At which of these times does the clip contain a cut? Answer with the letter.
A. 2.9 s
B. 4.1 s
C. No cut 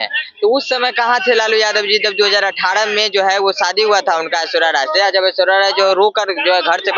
C